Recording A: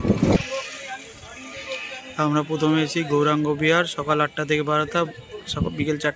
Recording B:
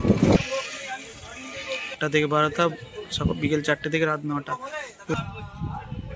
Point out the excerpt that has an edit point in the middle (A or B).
B